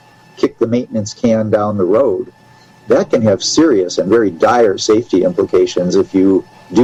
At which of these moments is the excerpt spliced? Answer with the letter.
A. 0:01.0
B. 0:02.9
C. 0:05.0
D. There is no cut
D